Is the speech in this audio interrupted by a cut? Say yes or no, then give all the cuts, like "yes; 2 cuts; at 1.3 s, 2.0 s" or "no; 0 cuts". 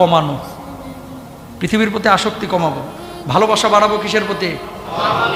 no; 0 cuts